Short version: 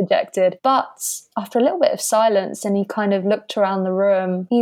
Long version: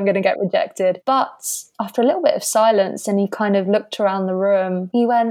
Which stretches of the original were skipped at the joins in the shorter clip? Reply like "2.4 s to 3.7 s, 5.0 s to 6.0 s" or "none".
none